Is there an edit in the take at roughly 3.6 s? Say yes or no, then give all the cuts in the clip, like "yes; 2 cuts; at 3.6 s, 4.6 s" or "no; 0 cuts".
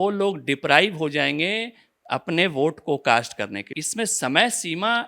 yes; 1 cut; at 3.6 s